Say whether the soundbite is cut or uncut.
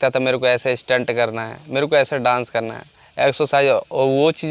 uncut